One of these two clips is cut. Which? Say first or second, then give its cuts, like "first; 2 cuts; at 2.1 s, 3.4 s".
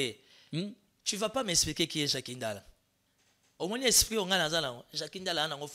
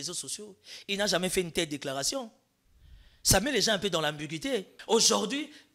second; 1 cut; at 4.8 s